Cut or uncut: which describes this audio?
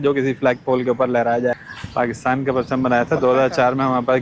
cut